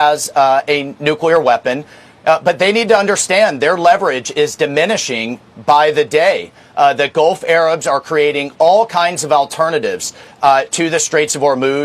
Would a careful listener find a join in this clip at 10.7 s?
yes; 1 cut; at 10.7 s

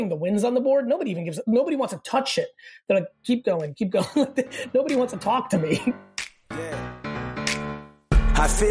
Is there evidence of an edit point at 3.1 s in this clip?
no; 1 cut; at 6.0 s

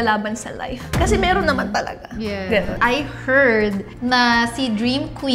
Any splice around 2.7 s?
no; 0 cuts

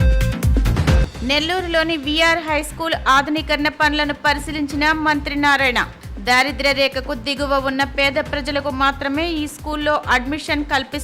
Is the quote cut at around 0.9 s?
yes; 1 cut; at 0.9 s

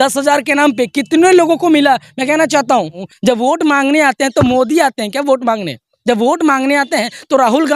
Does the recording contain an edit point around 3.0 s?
yes; 1 cut; at 3.0 s

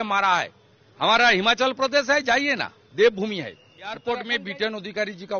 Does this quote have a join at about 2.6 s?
no; 1 cut; at 4.1 s

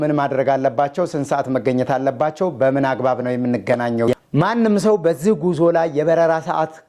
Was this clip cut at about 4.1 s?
yes; 1 cut; at 4.1 s

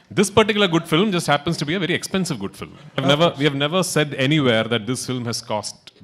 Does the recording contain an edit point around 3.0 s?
yes; 1 cut; at 3.0 s

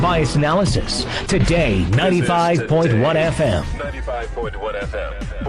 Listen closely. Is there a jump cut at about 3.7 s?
yes; 1 cut; at 3.7 s

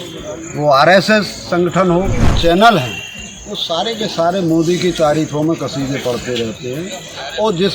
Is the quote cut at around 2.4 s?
yes; 1 cut; at 2.4 s

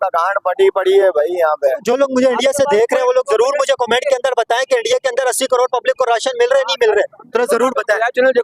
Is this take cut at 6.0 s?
no; 1 cut; at 1.8 s

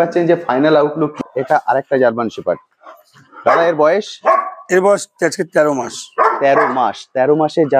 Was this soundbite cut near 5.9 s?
no; 1 cut; at 1.2 s

